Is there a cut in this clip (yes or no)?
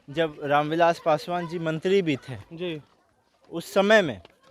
no